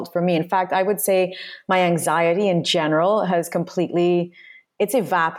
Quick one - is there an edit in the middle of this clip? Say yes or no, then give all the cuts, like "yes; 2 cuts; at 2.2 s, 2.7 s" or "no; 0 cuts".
no; 0 cuts